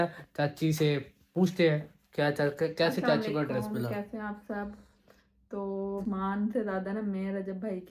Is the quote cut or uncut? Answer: cut